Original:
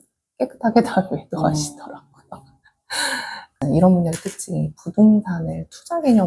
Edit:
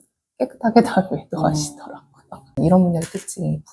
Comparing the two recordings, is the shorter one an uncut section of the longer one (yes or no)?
no